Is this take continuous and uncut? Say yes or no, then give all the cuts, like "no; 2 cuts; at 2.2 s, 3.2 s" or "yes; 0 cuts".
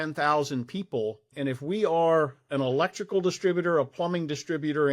no; 1 cut; at 1.3 s